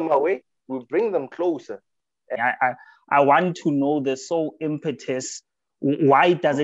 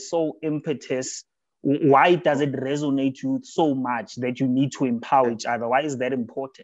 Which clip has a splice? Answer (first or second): first